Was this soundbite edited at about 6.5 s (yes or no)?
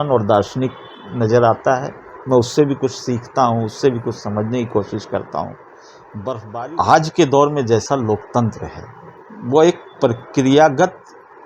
yes